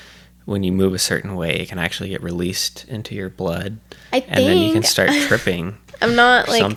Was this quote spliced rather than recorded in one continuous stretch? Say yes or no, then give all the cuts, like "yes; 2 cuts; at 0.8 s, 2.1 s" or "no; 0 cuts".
no; 0 cuts